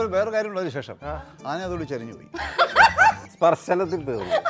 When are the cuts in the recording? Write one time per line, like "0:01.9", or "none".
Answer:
0:03.3